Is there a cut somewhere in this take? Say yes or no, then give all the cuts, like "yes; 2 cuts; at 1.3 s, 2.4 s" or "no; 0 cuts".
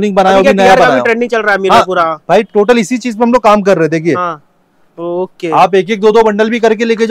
no; 0 cuts